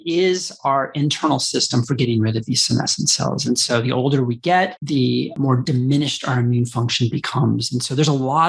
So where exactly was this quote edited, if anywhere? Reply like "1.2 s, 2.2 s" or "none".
none